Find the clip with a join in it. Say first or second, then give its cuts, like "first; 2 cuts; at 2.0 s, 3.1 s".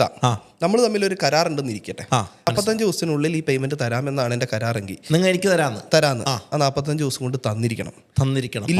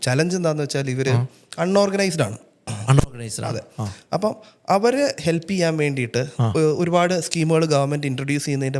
first; 1 cut; at 2.5 s